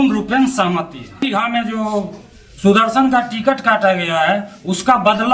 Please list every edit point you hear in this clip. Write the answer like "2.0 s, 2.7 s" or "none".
1.2 s